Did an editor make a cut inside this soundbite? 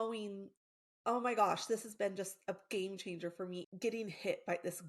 yes; 1 cut; at 3.6 s

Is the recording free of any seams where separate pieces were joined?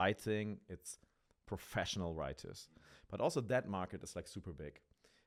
yes; 0 cuts

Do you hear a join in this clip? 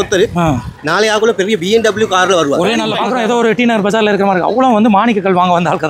yes; 1 cut; at 3.0 s

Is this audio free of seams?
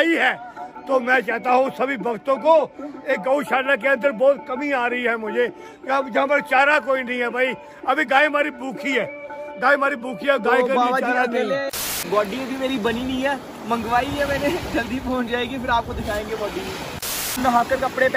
no; 2 cuts; at 11.9 s, 17.4 s

